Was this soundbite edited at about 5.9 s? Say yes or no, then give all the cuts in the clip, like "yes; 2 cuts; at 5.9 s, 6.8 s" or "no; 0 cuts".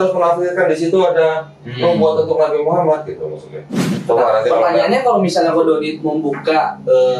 no; 1 cut; at 3.8 s